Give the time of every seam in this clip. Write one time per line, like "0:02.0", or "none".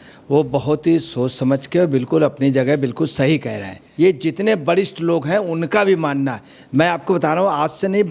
0:03.8